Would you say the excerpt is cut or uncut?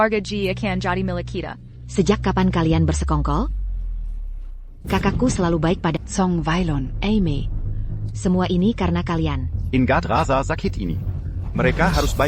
cut